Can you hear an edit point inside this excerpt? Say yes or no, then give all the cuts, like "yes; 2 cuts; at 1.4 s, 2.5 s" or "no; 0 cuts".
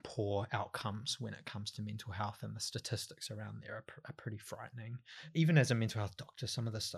yes; 1 cut; at 5.3 s